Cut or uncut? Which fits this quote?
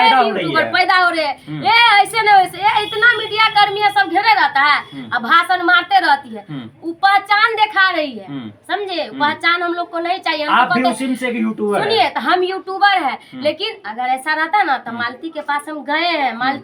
uncut